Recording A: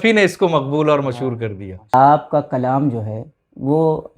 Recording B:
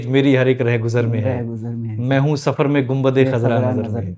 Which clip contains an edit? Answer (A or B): A